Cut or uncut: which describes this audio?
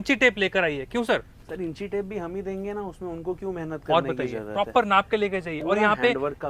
uncut